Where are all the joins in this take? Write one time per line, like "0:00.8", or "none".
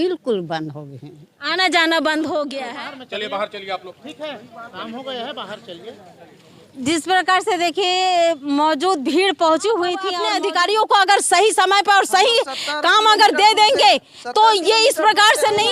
0:02.6
0:10.2